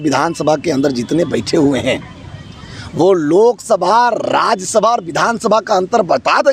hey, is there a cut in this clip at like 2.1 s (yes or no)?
no